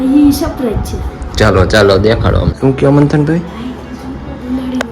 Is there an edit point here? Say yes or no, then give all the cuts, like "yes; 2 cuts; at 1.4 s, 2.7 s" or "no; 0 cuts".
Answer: yes; 1 cut; at 2.5 s